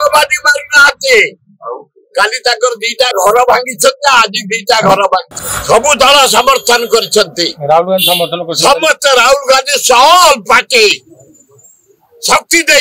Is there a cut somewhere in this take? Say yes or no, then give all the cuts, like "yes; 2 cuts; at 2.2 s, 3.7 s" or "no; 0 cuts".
no; 0 cuts